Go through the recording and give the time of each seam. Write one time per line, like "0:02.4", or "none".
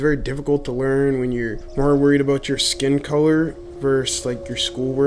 0:01.6
0:03.6